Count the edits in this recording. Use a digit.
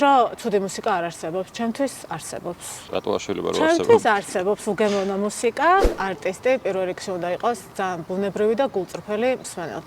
1